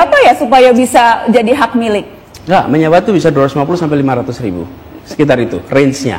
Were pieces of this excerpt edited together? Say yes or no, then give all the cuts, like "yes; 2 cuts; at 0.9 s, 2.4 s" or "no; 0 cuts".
no; 0 cuts